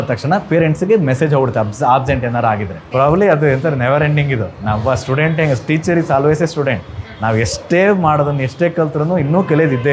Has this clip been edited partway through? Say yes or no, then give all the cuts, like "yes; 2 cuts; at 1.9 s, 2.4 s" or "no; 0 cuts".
yes; 1 cut; at 2.8 s